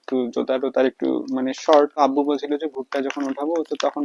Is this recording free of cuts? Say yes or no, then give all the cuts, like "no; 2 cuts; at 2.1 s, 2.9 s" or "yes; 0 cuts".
no; 1 cut; at 1.9 s